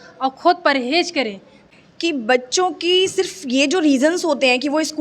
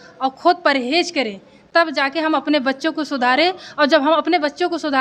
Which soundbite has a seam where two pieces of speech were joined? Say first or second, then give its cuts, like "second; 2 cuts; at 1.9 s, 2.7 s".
first; 1 cut; at 1.6 s